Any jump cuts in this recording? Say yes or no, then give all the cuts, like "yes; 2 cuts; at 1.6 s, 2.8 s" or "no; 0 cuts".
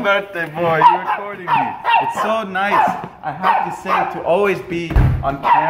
no; 0 cuts